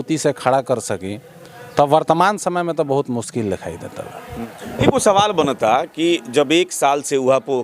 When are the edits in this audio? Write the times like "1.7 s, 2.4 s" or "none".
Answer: 4.4 s